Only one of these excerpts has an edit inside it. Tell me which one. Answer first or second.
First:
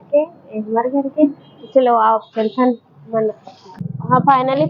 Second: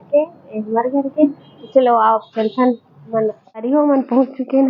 second